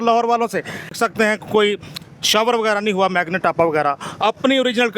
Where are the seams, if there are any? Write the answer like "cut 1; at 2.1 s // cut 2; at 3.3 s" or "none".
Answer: cut 1; at 1.0 s